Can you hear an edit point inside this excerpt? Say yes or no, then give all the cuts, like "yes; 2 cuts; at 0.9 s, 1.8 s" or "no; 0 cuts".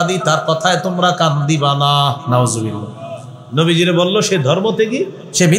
no; 0 cuts